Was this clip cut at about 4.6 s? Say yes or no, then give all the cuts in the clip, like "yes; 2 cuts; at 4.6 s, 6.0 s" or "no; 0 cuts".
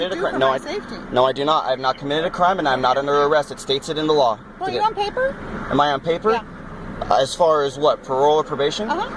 yes; 1 cut; at 4.6 s